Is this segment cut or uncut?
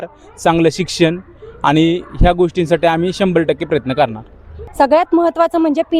cut